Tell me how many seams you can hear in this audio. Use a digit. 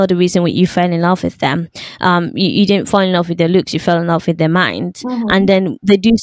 0